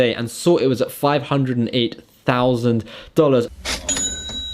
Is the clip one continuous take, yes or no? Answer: no